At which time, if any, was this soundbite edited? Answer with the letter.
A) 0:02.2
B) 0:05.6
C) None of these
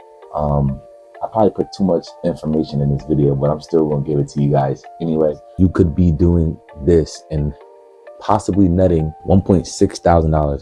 B